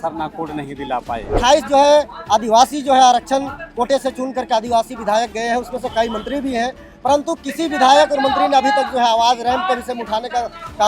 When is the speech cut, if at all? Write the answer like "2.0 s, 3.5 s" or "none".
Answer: 1.4 s